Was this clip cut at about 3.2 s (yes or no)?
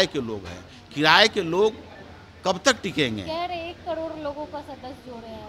no